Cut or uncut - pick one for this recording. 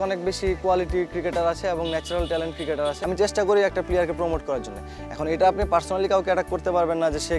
cut